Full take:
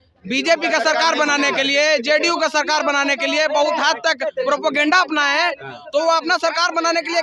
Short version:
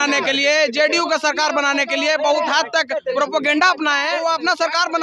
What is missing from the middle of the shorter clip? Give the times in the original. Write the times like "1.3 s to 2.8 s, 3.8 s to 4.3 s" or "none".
5.4 s to 5.9 s